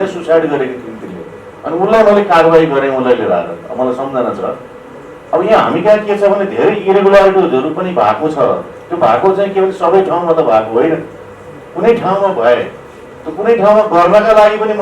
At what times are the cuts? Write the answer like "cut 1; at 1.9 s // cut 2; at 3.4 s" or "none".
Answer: none